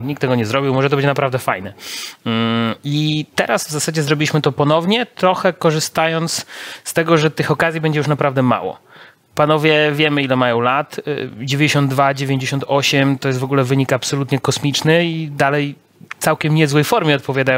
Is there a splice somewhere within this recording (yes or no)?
no